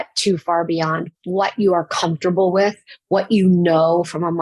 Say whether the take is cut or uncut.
uncut